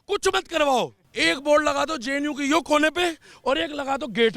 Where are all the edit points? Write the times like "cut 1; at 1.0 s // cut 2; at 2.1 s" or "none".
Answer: cut 1; at 1.0 s